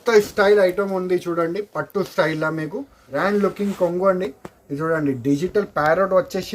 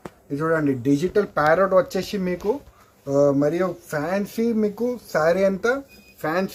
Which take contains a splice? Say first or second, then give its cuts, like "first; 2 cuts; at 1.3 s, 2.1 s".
first; 1 cut; at 3.0 s